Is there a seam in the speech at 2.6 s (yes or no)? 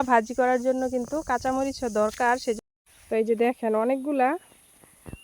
yes